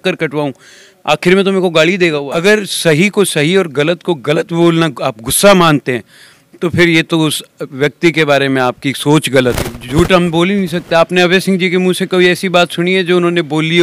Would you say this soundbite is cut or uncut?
cut